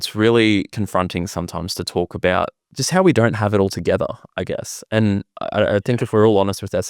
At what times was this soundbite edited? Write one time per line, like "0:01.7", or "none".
0:02.7